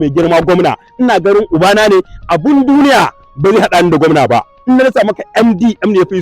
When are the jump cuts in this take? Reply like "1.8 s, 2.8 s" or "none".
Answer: 4.5 s